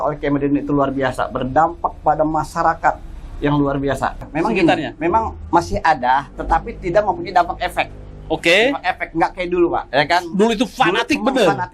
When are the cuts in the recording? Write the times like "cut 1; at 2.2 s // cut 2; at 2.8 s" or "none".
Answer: cut 1; at 4.3 s